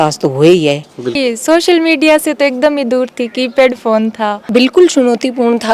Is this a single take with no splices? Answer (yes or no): no